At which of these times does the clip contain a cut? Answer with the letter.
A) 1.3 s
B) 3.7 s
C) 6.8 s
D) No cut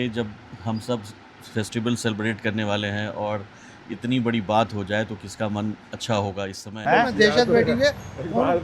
C